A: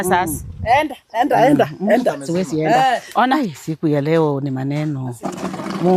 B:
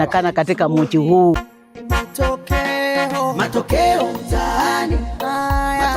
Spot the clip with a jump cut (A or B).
B